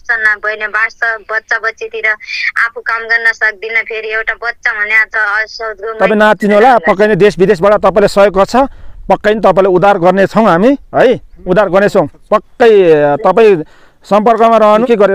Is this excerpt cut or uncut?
uncut